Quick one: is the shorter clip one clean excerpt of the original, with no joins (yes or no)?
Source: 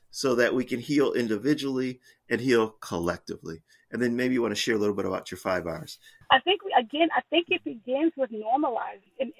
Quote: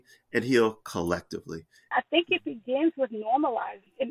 no